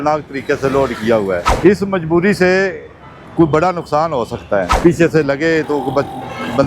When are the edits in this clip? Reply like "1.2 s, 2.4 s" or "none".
1.5 s, 4.7 s